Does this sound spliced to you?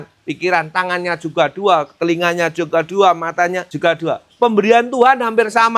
yes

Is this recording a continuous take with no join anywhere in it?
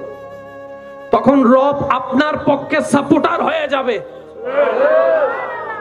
yes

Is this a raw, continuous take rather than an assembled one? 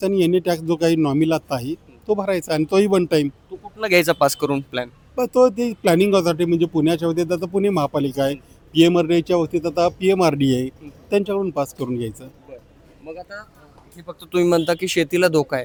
yes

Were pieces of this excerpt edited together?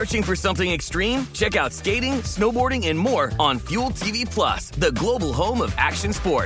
no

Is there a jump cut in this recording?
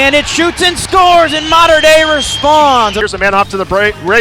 yes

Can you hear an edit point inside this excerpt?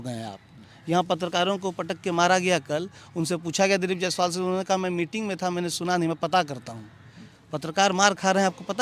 no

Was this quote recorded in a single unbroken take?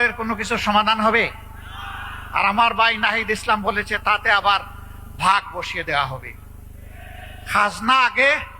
yes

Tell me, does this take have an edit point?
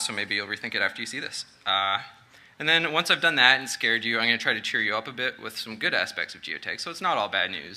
yes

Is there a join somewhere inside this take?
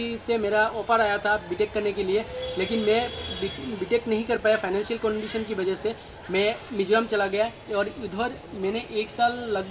no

